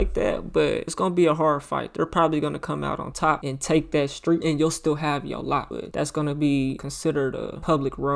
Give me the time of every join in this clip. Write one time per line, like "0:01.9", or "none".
0:00.9
0:03.1
0:04.4
0:05.7
0:07.2